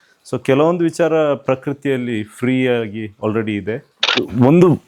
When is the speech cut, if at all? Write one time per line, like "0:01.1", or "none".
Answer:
0:04.0